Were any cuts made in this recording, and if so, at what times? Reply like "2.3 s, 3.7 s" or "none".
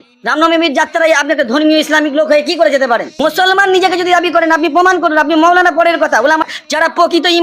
3.1 s, 6.4 s